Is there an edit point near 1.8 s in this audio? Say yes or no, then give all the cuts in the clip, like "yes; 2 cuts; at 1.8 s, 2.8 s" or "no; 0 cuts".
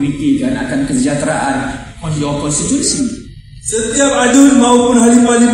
no; 1 cut; at 3.2 s